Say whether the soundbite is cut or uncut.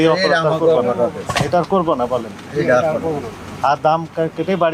uncut